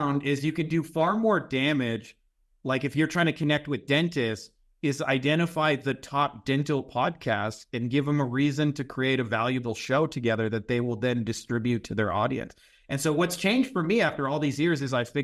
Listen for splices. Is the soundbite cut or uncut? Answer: uncut